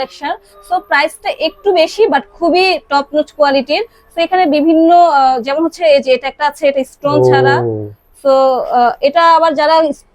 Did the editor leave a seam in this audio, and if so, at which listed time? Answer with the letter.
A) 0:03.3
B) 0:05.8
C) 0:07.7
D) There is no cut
D